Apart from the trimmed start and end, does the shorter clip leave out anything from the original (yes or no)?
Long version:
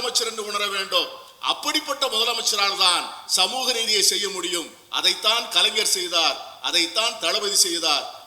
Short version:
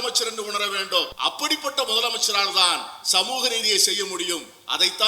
yes